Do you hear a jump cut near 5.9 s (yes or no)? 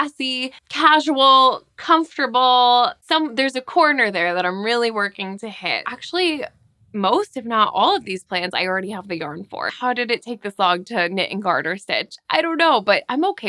yes